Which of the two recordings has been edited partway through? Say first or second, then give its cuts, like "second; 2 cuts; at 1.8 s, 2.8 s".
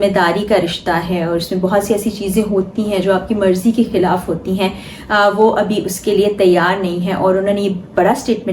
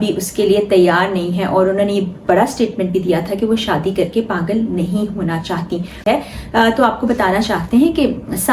second; 1 cut; at 5.9 s